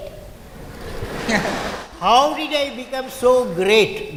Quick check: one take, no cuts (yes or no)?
yes